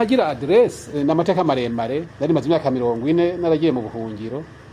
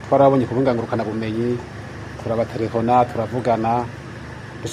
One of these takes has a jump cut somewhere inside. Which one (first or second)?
first